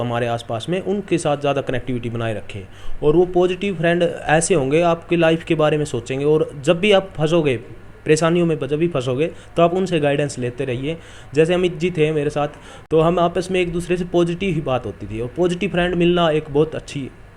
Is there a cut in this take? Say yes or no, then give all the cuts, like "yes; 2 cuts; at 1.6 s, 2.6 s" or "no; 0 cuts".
no; 0 cuts